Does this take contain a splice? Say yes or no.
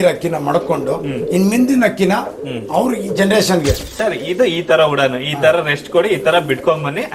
yes